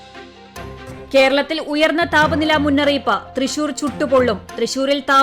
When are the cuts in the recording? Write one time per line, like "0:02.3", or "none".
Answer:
0:01.0